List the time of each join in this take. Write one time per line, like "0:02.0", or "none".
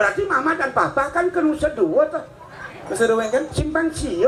none